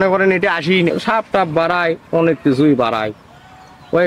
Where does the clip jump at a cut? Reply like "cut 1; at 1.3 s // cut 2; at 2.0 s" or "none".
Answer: cut 1; at 0.9 s